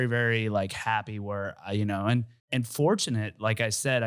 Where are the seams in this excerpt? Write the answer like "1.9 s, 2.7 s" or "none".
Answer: 2.4 s

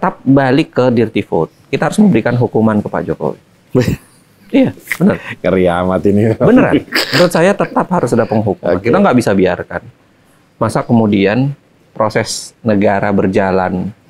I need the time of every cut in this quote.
none

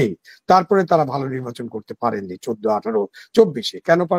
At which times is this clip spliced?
none

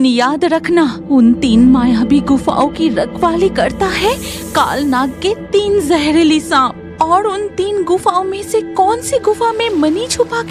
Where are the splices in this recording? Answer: 1.0 s

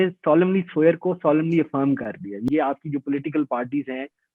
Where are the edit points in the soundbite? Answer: 2.4 s

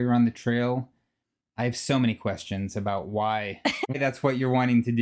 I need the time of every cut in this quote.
3.9 s

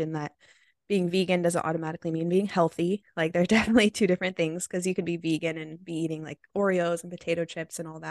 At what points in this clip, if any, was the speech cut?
none

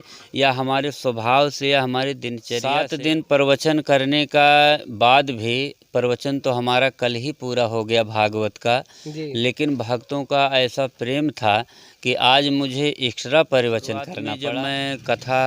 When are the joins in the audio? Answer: 2.5 s, 14.3 s

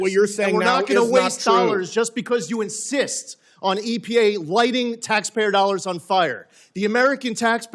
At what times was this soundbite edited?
none

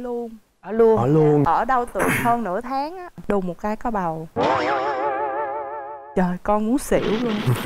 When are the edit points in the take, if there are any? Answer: 3.2 s

